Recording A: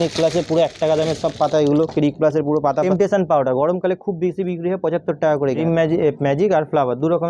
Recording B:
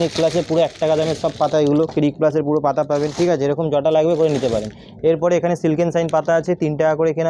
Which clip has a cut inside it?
A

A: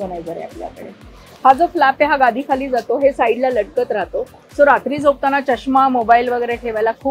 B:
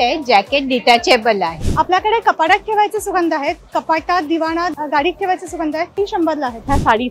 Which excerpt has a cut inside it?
B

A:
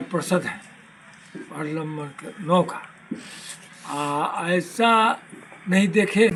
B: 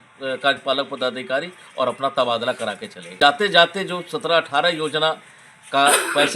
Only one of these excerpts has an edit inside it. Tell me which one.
B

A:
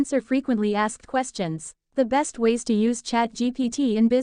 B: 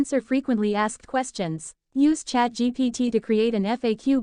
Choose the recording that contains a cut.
A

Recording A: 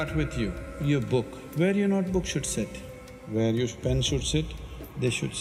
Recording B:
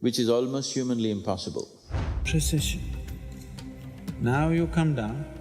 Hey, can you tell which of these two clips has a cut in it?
B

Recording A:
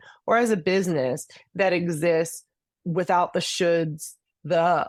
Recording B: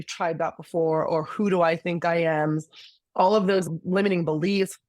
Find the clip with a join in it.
B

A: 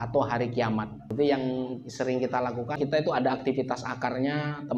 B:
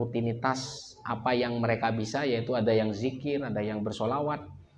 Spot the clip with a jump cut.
A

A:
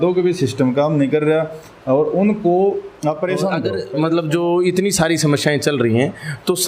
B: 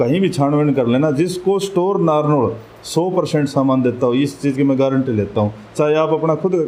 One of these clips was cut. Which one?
A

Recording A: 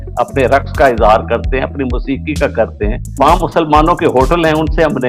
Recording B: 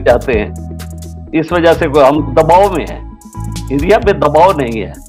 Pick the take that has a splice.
A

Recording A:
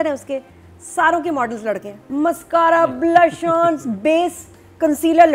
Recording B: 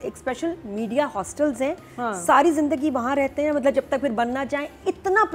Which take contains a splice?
A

